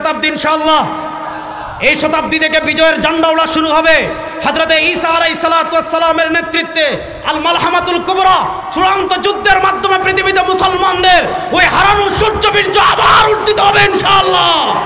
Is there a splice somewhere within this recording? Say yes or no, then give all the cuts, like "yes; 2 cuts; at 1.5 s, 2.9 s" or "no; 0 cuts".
no; 0 cuts